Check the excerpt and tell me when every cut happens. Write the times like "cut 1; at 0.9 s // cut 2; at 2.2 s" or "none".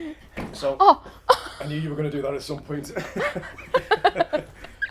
none